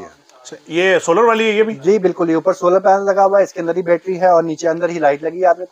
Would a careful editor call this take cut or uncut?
uncut